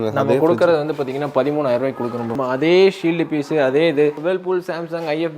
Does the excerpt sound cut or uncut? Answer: cut